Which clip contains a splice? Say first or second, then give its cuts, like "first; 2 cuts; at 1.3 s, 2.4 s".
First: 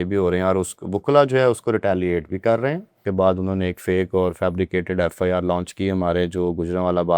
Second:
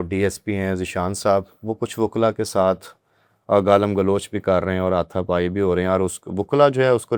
first; 1 cut; at 3.0 s